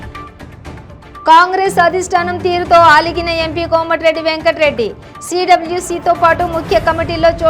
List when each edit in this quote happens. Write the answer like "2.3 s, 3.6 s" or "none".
0.9 s